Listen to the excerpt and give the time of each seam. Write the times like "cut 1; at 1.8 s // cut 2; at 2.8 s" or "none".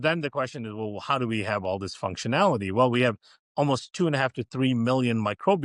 none